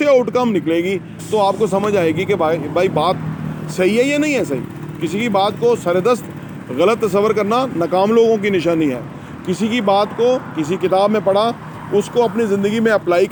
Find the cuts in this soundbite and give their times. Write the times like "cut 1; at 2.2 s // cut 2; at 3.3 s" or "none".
none